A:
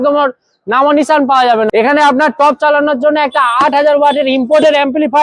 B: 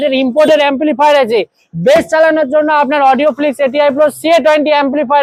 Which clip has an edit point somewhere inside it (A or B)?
A